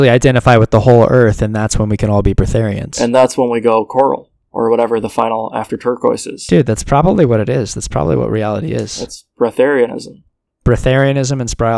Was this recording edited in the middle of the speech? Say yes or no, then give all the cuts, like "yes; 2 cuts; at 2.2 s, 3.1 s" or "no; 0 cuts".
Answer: yes; 1 cut; at 10.5 s